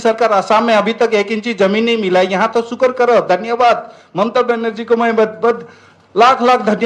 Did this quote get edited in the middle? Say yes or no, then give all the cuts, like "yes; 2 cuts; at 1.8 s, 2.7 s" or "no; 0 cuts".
no; 0 cuts